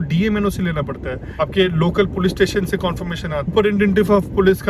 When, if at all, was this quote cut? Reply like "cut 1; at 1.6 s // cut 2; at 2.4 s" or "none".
cut 1; at 1.2 s // cut 2; at 3.5 s